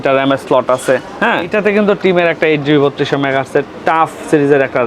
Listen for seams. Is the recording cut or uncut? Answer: cut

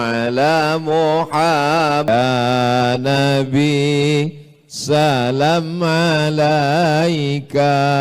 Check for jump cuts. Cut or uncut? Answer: cut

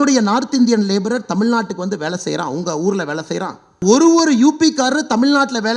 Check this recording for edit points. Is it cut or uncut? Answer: cut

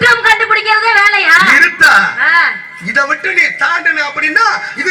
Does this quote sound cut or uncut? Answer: uncut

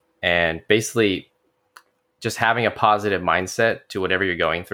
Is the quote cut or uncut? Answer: uncut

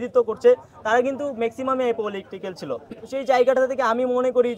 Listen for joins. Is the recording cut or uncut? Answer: uncut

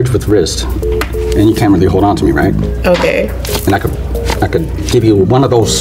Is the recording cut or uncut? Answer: uncut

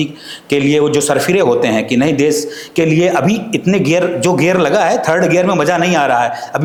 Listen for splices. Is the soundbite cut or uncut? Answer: uncut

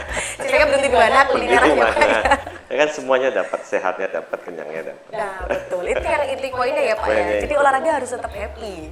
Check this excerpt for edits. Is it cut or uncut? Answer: uncut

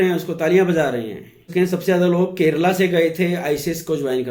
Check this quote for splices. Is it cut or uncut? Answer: cut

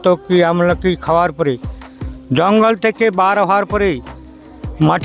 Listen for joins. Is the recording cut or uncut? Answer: uncut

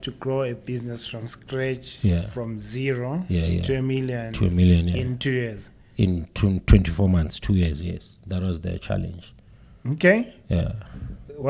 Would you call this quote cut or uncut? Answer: uncut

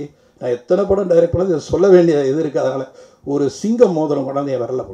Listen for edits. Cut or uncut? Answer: uncut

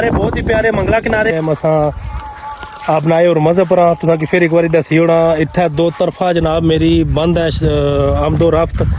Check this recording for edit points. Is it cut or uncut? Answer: cut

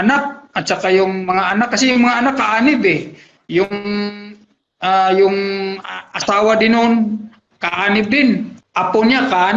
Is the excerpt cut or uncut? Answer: cut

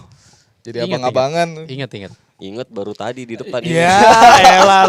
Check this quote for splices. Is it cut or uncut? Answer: uncut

